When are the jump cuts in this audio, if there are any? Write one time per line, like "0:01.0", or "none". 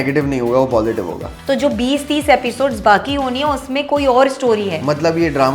0:01.3